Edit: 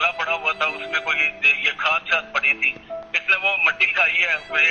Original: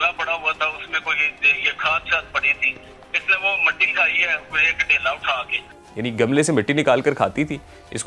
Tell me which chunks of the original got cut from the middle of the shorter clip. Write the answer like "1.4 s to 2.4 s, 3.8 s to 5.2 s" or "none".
none